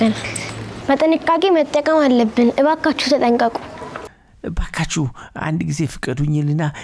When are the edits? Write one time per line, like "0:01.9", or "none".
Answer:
0:04.2